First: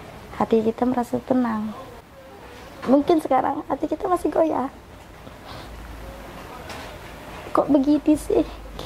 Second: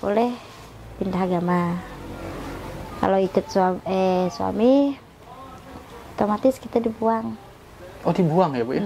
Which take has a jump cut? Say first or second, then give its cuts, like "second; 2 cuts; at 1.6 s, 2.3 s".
first; 1 cut; at 1.8 s